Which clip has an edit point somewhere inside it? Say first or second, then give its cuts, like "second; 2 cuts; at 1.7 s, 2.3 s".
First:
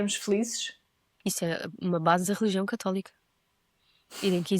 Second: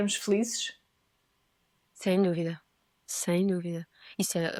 first; 1 cut; at 1.0 s